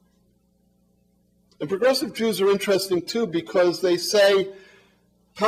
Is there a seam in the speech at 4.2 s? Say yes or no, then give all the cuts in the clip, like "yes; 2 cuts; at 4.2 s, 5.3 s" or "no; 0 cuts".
yes; 1 cut; at 4.2 s